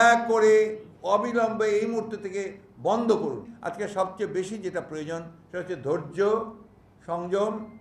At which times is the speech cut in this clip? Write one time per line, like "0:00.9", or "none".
0:03.5